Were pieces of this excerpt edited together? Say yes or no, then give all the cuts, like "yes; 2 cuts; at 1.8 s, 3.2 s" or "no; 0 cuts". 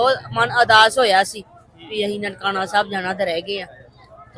no; 0 cuts